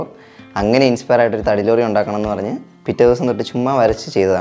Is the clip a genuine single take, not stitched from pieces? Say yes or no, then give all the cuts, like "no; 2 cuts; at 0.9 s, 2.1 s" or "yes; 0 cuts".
yes; 0 cuts